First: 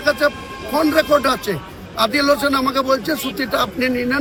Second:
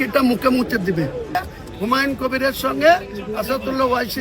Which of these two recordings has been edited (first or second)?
second